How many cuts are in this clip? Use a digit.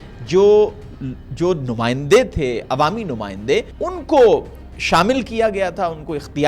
1